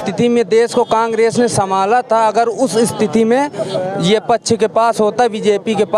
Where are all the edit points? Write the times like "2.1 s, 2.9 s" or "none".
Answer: none